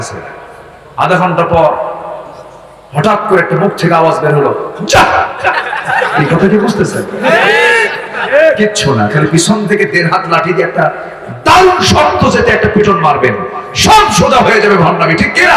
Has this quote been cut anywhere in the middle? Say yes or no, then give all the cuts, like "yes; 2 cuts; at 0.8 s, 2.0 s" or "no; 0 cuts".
yes; 1 cut; at 8.0 s